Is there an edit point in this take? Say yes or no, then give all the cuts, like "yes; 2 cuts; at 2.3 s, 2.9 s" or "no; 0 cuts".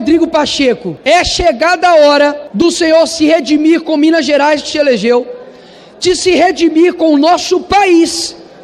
yes; 2 cuts; at 0.9 s, 2.4 s